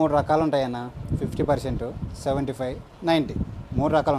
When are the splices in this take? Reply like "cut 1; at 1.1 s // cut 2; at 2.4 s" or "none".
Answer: none